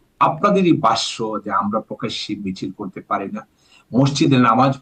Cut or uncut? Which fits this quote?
uncut